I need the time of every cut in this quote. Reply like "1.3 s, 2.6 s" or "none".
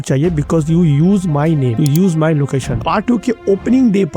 2.8 s